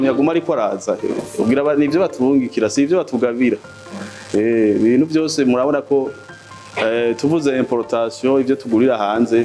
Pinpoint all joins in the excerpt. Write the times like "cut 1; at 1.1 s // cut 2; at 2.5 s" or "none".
none